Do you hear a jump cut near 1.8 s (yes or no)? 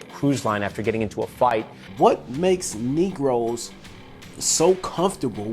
yes